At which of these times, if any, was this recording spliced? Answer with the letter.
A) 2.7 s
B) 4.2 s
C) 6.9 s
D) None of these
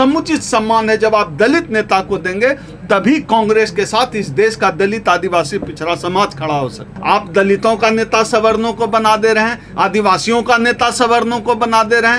C